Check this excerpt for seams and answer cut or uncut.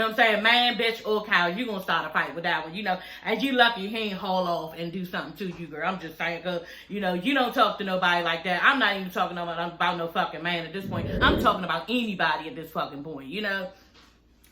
cut